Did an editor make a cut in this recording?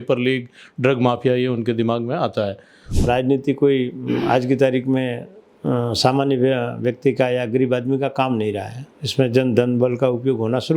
yes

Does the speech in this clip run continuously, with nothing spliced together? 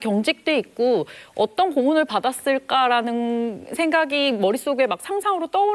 yes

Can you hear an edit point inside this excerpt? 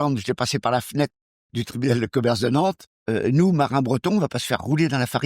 yes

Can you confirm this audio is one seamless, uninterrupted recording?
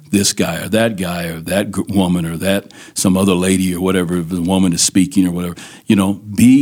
yes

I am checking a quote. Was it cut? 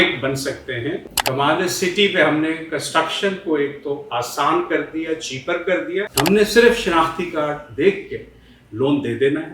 yes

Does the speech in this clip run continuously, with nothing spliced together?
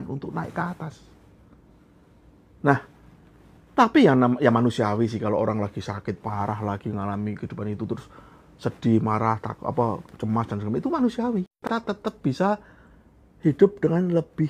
yes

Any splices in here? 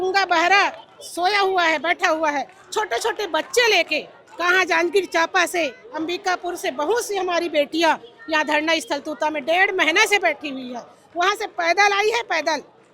no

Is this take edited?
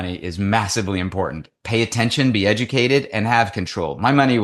no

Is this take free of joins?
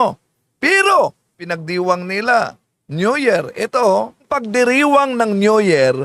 no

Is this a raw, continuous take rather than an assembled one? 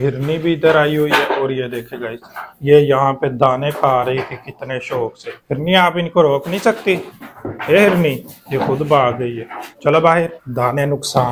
yes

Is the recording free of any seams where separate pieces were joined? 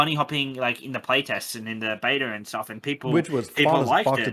yes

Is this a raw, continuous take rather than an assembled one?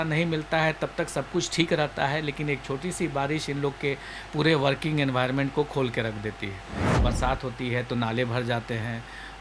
no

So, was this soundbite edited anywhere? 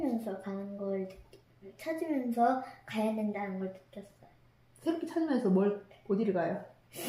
no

